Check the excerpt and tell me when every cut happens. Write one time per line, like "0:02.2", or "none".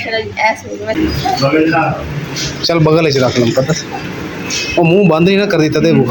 0:01.0